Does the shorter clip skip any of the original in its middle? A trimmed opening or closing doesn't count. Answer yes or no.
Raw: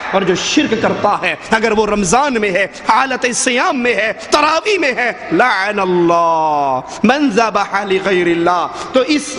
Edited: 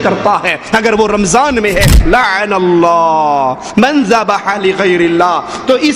yes